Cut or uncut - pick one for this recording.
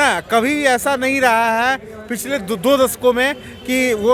uncut